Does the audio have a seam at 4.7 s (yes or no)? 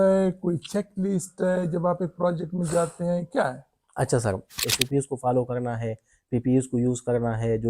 yes